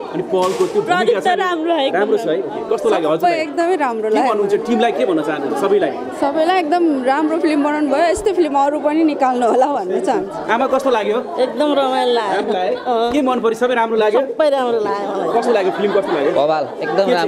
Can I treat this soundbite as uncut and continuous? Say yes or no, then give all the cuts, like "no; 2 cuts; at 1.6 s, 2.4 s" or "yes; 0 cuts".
yes; 0 cuts